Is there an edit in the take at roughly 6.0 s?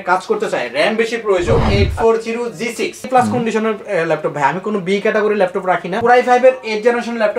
yes; 3 cuts; at 1.6 s, 3.1 s, 6.0 s

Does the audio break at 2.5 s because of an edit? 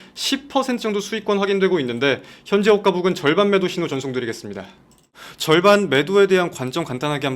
no; 1 cut; at 5.2 s

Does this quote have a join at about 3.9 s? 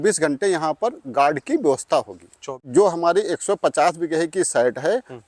no; 1 cut; at 2.6 s

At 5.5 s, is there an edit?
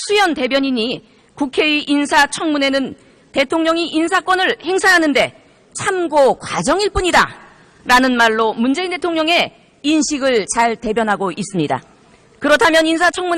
no; 1 cut; at 12.0 s

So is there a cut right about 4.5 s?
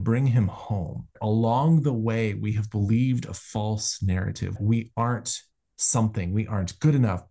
yes; 2 cuts; at 1.2 s, 4.5 s

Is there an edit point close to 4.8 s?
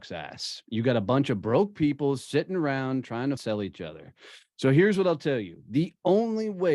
no; 1 cut; at 3.4 s

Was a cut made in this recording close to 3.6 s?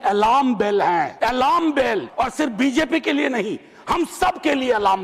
no; 2 cuts; at 1.1 s, 2.1 s

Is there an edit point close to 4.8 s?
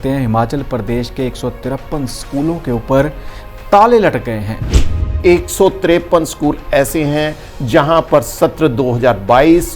yes; 1 cut; at 4.8 s

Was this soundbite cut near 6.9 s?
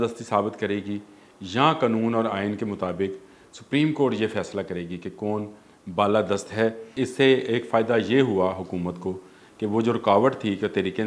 yes; 1 cut; at 6.9 s

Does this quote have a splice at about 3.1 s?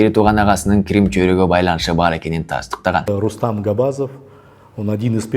yes; 1 cut; at 3.1 s

